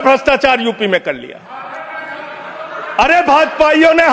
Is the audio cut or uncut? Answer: uncut